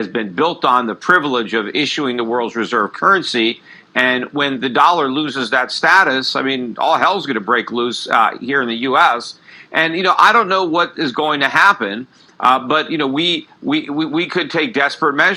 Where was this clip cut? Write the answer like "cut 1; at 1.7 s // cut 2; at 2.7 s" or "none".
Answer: cut 1; at 8.0 s